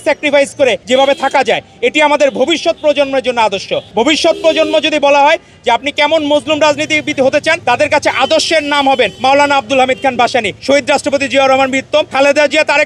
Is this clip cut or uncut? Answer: cut